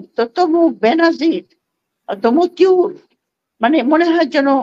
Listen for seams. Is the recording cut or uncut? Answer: uncut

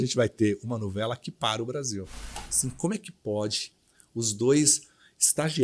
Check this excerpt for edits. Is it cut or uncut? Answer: cut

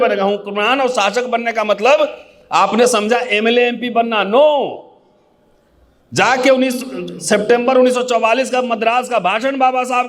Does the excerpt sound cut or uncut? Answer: uncut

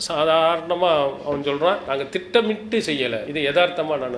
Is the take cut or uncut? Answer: cut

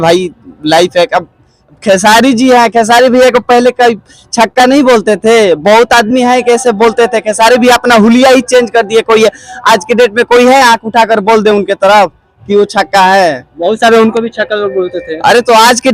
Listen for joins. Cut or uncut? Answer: uncut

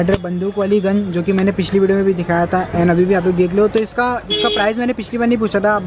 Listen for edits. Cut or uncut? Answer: uncut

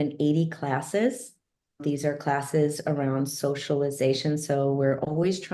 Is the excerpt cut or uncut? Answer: cut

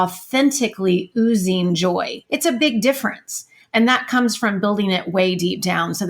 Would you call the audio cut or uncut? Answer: cut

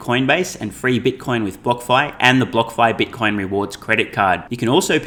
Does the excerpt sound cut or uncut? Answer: uncut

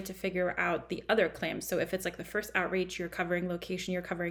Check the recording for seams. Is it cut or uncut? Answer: uncut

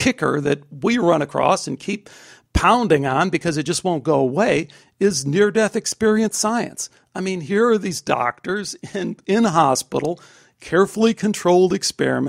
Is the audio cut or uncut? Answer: uncut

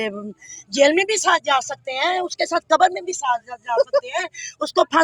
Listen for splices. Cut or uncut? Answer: uncut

